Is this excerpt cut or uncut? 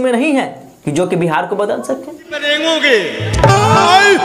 cut